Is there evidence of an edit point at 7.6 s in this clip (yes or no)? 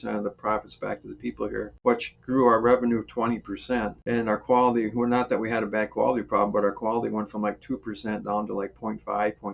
no